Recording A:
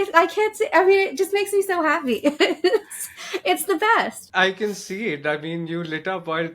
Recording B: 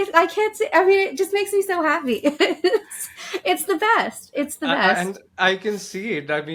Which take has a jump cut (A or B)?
A